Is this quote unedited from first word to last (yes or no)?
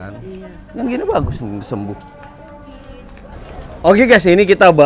yes